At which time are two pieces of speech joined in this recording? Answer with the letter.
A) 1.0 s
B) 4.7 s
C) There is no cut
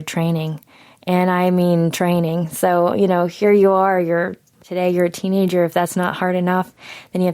B